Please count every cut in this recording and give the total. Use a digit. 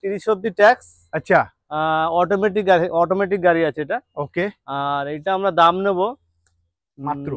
0